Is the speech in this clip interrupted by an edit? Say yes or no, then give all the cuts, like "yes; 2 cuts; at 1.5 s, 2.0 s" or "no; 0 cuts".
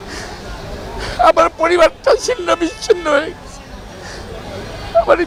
no; 0 cuts